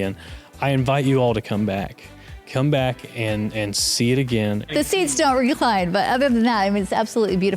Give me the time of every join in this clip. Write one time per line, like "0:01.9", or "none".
0:04.7